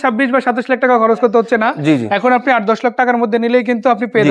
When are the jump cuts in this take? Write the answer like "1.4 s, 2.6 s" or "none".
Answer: none